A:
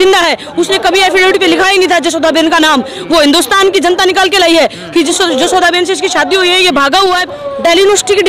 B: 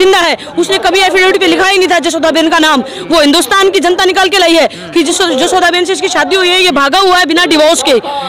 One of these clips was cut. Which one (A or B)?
A